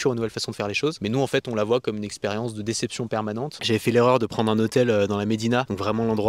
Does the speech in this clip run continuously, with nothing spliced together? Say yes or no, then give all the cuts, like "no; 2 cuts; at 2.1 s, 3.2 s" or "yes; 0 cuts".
no; 2 cuts; at 1.0 s, 3.5 s